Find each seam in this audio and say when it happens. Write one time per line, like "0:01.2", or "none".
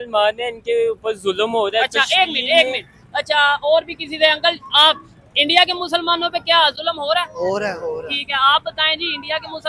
none